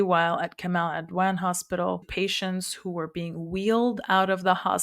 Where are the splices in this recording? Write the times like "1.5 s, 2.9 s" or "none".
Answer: 2.0 s

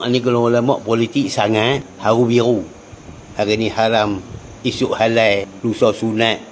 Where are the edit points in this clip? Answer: 1.9 s, 5.5 s

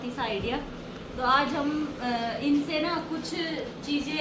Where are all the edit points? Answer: none

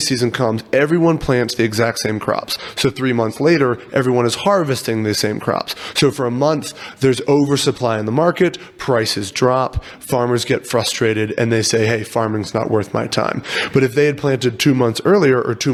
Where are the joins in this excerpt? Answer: none

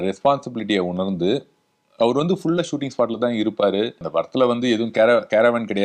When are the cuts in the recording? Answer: 4.0 s

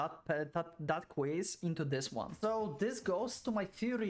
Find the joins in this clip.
2.3 s

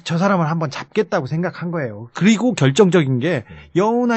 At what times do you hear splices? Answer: 2.7 s

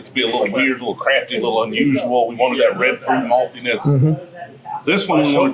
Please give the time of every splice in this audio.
none

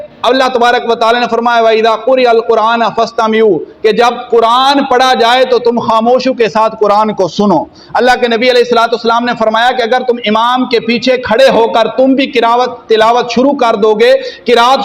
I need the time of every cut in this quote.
none

